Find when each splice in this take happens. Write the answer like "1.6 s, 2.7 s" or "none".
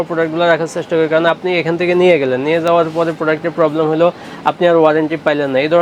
none